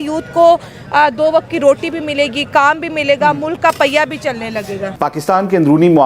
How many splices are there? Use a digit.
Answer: 1